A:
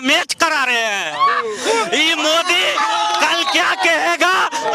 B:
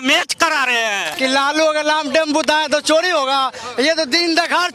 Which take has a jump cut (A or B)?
B